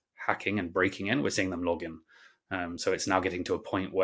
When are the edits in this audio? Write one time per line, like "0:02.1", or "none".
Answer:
none